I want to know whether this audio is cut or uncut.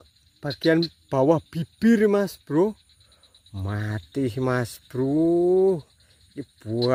uncut